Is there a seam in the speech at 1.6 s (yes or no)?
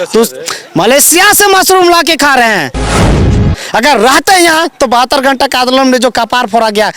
no